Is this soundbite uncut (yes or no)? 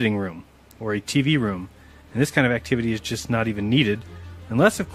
yes